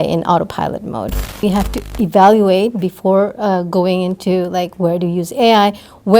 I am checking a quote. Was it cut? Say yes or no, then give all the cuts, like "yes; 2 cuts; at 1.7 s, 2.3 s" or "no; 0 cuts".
yes; 1 cut; at 1.4 s